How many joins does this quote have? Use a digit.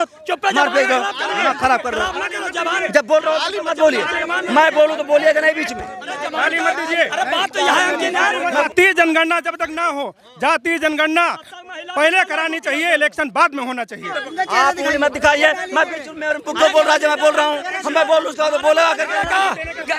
2